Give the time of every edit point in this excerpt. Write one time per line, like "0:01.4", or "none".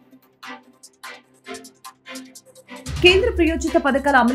none